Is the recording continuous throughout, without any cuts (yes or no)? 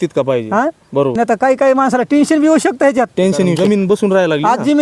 no